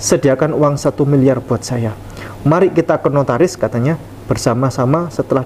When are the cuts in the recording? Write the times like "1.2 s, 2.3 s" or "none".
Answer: none